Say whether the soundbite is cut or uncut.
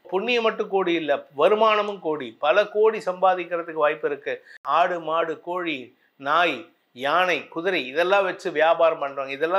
cut